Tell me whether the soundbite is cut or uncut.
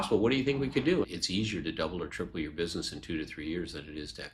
cut